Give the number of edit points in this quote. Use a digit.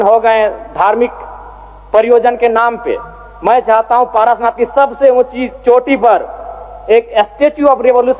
0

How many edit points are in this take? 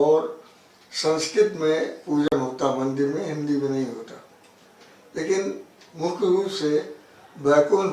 0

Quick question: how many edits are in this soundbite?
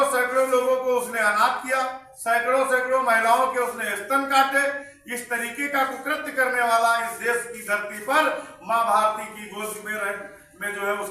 0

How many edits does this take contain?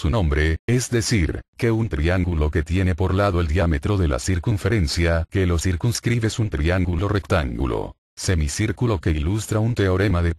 1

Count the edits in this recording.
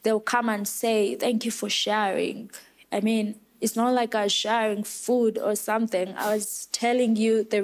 0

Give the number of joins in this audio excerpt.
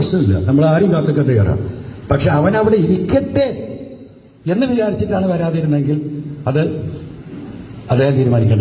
0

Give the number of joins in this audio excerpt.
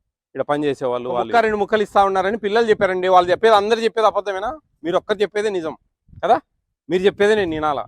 1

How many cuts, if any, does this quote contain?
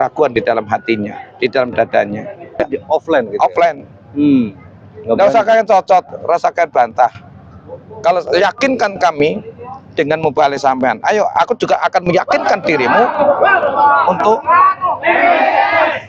1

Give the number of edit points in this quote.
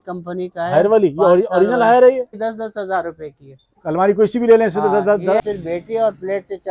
2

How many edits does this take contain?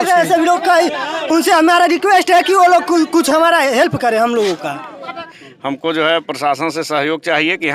1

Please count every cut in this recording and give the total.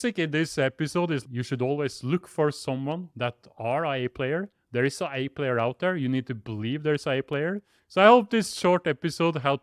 2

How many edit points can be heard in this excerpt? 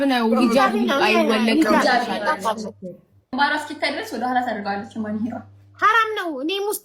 1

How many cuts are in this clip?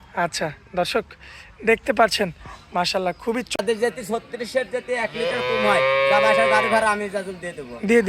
1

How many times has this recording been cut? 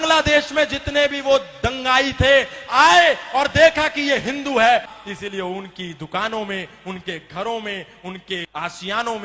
2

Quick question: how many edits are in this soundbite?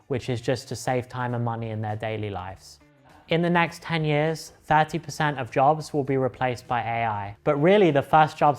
2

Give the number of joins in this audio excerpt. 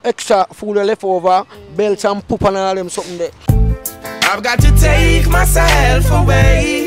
1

